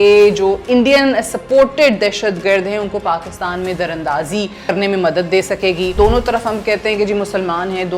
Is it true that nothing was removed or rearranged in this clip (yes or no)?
no